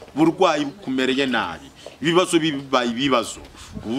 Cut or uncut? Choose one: uncut